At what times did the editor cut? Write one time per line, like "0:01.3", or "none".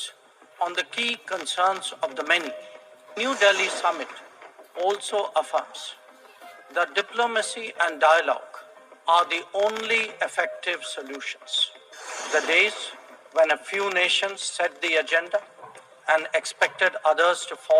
0:03.2
0:12.1